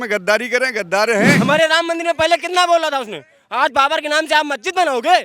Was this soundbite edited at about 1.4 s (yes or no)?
yes